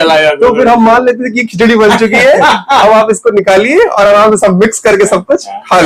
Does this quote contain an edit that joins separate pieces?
no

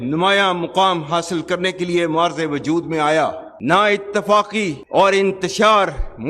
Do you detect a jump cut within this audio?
yes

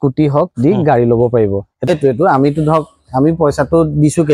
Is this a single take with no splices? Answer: no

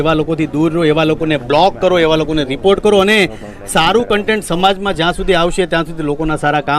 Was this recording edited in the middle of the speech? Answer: no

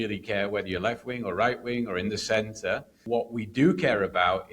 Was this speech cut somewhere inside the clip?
yes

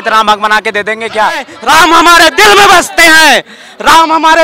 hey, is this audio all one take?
no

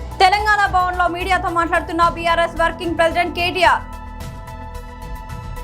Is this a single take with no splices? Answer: no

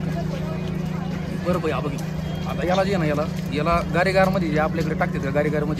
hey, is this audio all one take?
yes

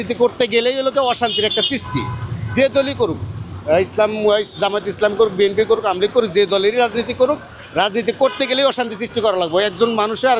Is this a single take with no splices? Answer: yes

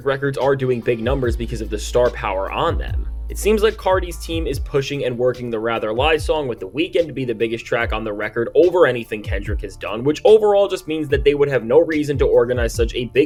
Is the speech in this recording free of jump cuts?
yes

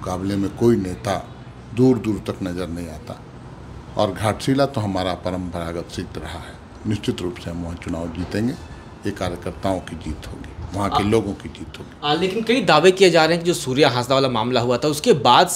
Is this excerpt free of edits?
yes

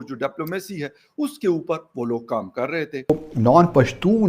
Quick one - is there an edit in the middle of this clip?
yes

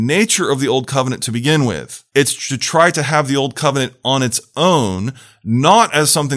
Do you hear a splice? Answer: yes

